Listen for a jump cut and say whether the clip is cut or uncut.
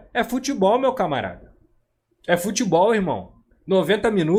uncut